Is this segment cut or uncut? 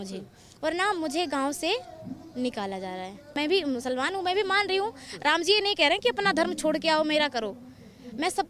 cut